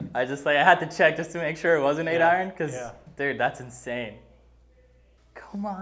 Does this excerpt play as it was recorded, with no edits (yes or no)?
yes